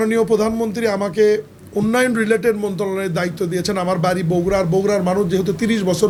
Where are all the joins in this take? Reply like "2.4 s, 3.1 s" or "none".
none